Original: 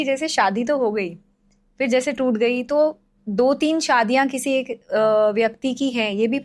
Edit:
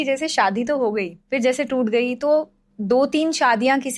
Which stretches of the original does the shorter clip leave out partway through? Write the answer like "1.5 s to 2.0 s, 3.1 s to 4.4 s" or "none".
1.2 s to 1.7 s